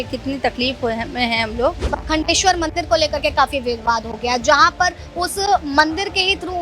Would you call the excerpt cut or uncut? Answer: cut